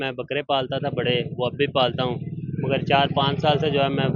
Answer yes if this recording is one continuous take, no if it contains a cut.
yes